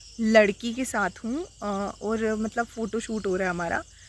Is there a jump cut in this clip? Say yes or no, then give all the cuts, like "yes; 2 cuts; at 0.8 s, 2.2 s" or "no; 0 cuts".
no; 0 cuts